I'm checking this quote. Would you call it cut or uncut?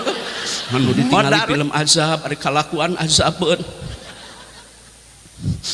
cut